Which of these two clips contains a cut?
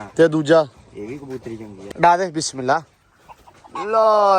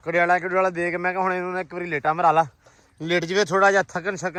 first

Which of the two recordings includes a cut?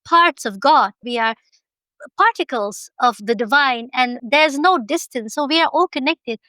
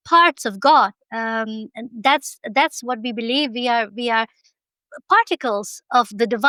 first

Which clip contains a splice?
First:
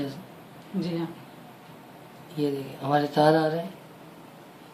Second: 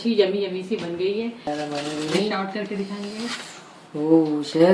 second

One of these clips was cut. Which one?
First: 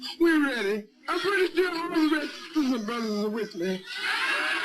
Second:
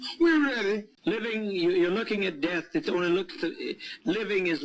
second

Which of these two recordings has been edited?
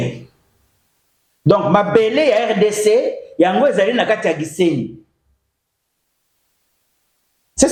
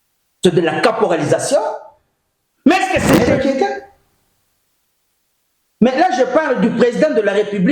second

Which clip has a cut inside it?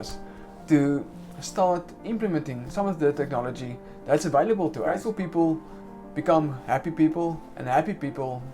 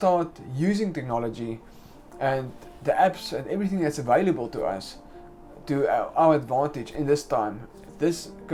first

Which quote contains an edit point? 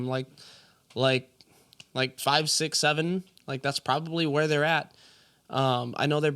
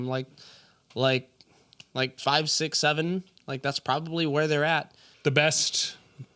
second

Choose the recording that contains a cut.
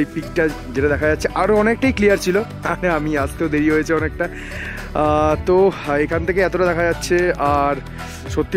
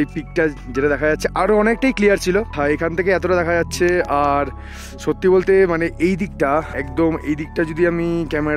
second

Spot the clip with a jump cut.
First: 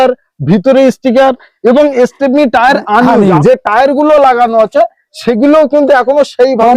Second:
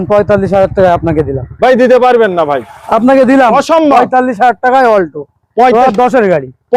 first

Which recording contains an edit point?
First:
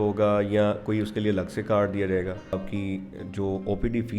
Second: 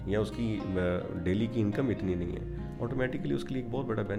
first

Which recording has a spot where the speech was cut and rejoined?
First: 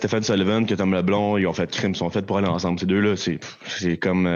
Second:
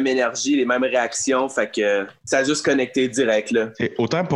second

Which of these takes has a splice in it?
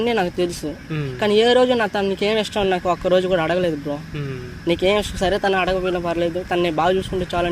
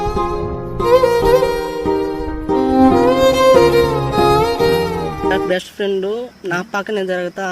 second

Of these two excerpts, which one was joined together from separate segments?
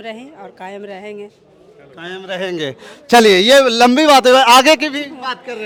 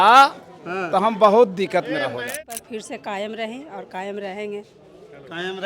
second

